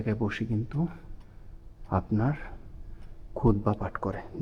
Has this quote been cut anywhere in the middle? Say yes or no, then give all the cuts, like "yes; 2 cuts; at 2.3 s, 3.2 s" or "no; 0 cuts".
no; 0 cuts